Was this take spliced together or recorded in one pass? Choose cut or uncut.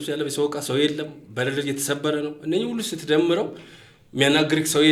uncut